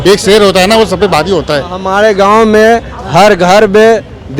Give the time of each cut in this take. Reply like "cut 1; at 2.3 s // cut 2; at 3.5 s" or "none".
cut 1; at 1.8 s